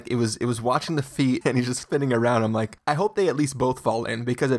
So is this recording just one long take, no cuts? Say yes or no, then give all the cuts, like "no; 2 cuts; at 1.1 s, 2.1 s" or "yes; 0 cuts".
no; 2 cuts; at 1.4 s, 2.7 s